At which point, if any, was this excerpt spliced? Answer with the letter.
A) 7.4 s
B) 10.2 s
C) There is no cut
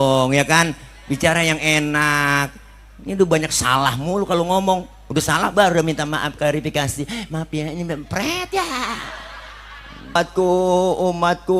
B